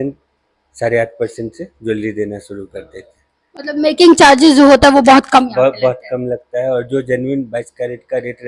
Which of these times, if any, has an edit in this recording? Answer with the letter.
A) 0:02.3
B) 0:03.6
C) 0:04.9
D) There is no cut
D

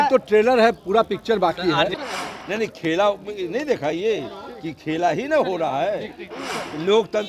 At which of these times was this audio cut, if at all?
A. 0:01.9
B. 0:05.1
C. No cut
A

